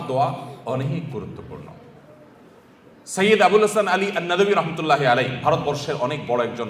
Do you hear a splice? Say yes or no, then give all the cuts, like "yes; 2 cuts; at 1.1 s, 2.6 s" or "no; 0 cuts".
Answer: no; 0 cuts